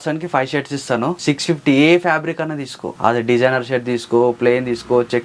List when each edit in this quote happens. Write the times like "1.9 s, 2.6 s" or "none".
1.2 s, 2.9 s